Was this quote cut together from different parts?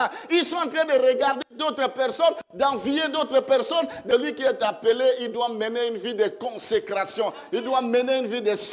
yes; 1 cut; at 4.0 s

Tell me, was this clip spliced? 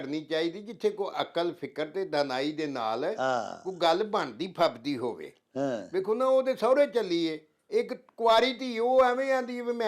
no; 0 cuts

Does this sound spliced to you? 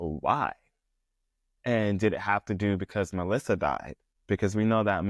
no; 0 cuts

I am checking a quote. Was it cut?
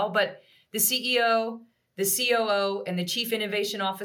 no; 0 cuts

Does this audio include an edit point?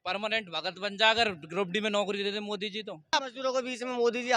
yes; 1 cut; at 3.1 s

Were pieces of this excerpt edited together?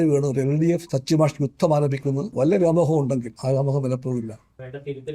yes; 3 cuts; at 0.9 s, 2.3 s, 3.3 s

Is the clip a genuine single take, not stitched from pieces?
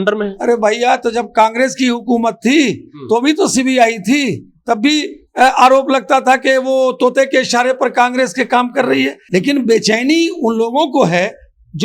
no; 1 cut; at 9.2 s

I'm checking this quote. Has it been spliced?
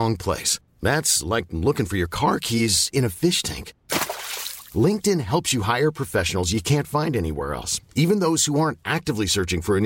no; 0 cuts

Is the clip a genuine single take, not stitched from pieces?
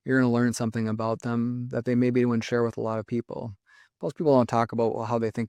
yes; 0 cuts

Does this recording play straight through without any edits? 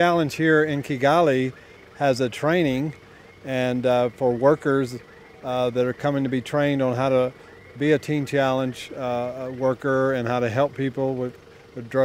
yes; 0 cuts

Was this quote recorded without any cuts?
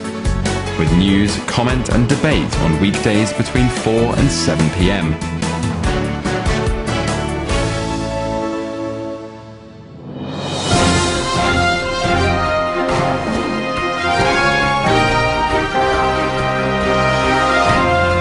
yes; 0 cuts

